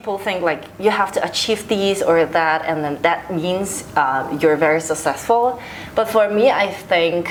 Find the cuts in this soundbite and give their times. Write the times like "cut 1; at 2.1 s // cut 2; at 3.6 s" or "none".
none